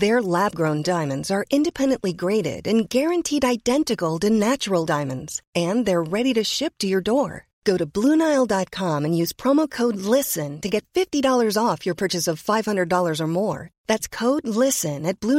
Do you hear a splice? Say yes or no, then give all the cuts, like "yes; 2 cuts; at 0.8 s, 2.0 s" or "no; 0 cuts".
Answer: no; 0 cuts